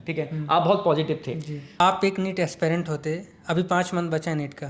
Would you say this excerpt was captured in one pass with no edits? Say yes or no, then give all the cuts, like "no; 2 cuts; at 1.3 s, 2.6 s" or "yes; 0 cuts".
no; 1 cut; at 1.7 s